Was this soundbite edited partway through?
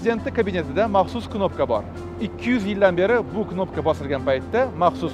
no; 0 cuts

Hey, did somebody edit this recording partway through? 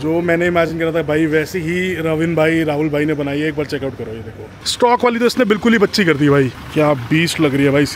yes; 2 cuts; at 4.7 s, 6.5 s

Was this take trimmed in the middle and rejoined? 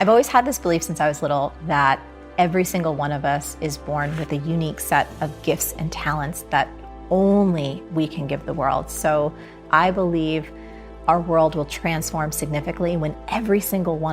yes; 1 cut; at 9.5 s

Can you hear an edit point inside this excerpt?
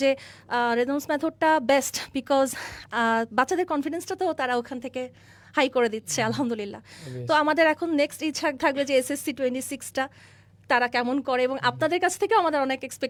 no; 0 cuts

